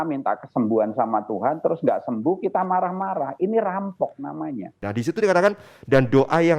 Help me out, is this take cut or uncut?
cut